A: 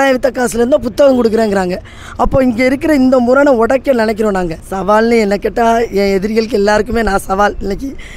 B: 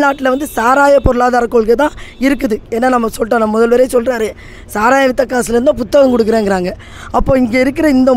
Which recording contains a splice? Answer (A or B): A